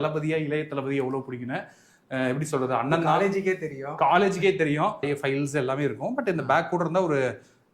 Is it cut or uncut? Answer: cut